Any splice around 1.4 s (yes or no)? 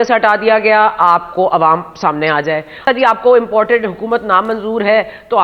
no